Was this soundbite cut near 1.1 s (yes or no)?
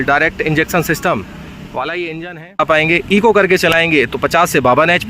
no